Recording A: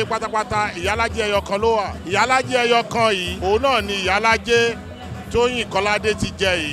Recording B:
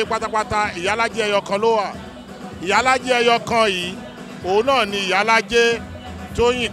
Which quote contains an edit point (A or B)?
A